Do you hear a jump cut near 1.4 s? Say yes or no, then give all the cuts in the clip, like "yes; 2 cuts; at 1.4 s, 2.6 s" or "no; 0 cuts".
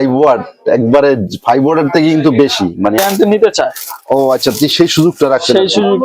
no; 1 cut; at 3.0 s